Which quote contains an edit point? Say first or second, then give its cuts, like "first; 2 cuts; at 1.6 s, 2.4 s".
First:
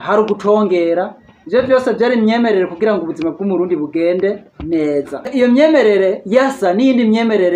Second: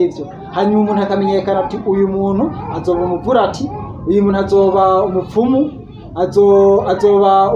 first; 1 cut; at 5.3 s